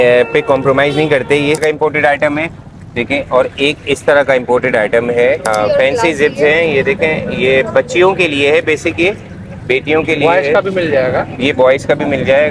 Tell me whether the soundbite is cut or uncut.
cut